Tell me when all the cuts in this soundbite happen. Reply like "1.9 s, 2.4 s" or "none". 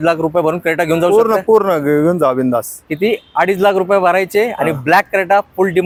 none